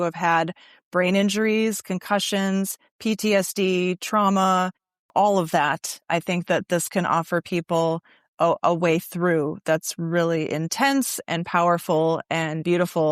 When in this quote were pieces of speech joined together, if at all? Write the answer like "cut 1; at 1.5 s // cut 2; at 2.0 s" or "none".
cut 1; at 5.1 s